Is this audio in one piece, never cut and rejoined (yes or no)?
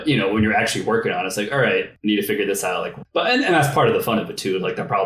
no